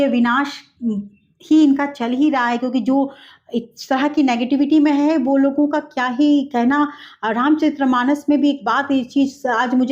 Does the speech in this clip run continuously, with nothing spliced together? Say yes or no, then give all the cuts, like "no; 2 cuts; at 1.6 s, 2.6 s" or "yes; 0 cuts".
yes; 0 cuts